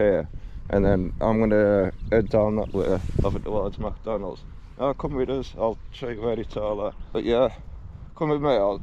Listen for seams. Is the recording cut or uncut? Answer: cut